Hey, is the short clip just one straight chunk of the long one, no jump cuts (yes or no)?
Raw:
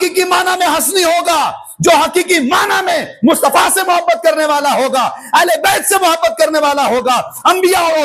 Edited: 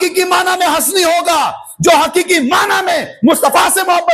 yes